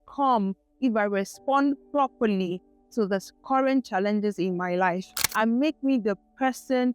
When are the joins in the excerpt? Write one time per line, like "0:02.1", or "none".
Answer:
0:05.2